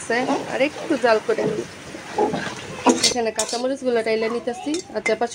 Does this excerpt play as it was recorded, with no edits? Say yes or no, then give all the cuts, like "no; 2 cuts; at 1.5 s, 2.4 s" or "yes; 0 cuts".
no; 1 cut; at 3.0 s